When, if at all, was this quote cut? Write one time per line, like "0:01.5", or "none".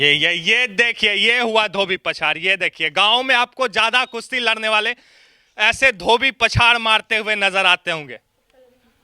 none